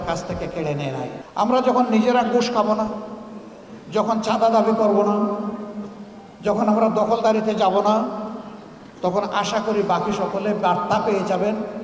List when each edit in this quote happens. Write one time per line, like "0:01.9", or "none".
0:01.2